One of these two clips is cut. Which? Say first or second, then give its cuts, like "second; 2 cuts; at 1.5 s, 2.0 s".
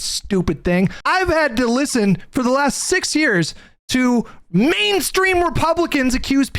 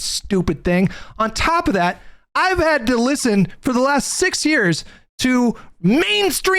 first; 1 cut; at 1.0 s